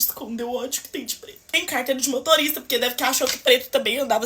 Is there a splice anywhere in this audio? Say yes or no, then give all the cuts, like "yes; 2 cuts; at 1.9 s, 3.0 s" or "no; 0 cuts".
yes; 1 cut; at 1.6 s